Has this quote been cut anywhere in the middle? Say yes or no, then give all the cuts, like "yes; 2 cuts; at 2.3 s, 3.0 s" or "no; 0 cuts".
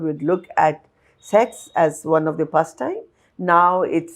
no; 0 cuts